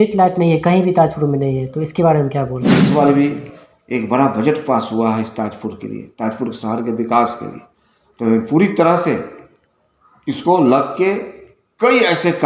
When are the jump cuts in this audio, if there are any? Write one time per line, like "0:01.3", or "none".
0:02.8